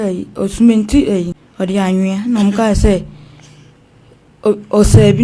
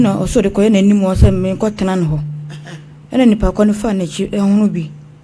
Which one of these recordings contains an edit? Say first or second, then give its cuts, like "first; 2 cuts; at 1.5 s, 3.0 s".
first; 1 cut; at 1.4 s